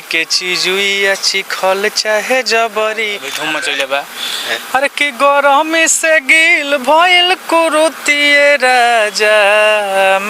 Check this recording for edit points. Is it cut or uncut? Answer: cut